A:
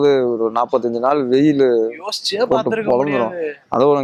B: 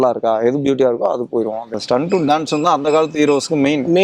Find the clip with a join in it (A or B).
B